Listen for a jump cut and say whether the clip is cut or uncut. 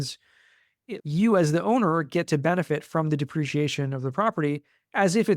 cut